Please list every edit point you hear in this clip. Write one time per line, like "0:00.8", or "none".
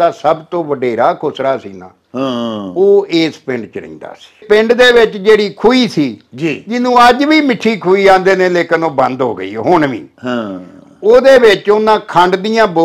0:04.4